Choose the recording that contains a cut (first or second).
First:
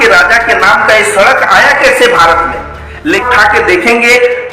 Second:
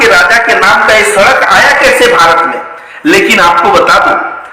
first